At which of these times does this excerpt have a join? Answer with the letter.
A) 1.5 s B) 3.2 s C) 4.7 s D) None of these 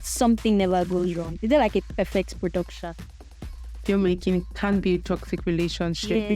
B